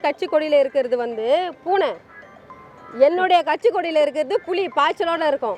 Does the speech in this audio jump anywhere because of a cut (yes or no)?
no